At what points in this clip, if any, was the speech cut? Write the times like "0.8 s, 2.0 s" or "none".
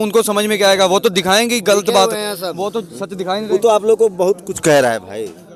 none